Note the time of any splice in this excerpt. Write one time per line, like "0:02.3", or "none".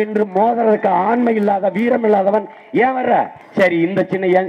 0:03.4